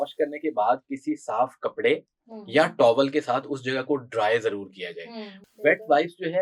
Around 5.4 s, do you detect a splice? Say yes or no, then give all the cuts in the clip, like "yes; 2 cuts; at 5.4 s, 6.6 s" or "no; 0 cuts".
yes; 1 cut; at 5.4 s